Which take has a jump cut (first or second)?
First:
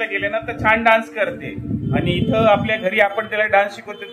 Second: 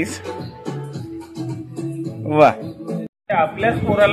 second